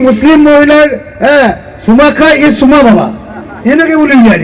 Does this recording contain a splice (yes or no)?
no